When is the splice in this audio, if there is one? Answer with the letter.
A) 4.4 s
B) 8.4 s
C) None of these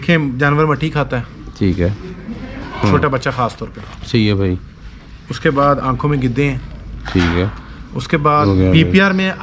B